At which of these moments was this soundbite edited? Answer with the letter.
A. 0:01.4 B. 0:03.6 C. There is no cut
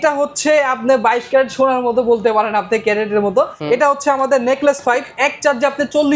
B